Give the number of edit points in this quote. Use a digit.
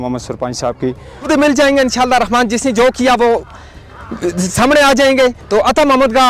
1